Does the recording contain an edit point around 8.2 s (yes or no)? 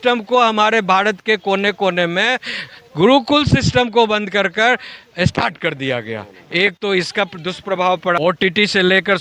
yes